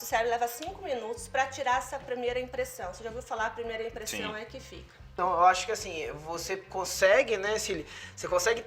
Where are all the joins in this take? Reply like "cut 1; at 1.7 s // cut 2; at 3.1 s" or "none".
cut 1; at 5.0 s

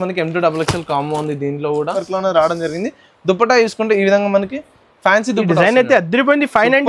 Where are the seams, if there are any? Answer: cut 1; at 2.0 s

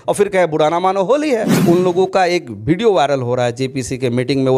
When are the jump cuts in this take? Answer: cut 1; at 1.5 s

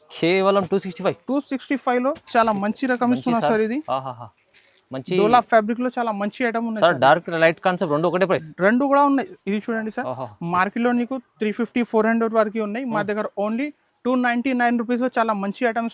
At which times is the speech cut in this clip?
cut 1; at 9.4 s

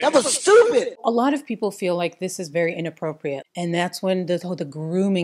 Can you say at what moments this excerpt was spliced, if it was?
none

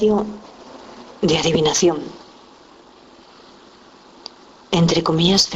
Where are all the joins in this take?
cut 1; at 1.1 s

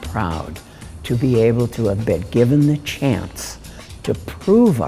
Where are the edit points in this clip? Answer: none

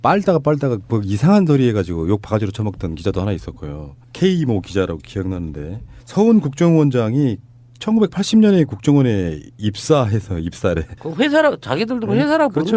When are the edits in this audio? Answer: cut 1; at 7.7 s

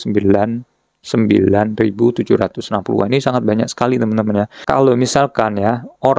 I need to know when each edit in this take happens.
cut 1; at 4.6 s

